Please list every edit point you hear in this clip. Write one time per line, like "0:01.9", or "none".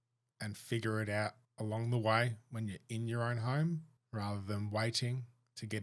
0:01.5
0:04.0